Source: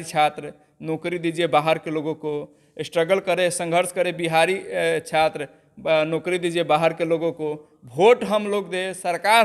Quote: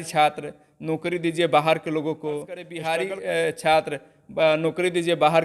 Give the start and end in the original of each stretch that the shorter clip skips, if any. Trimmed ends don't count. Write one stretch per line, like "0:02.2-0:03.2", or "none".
0:02.7-0:04.2